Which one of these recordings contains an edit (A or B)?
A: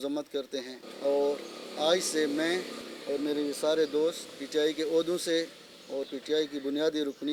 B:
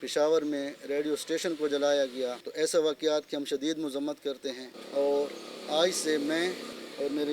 B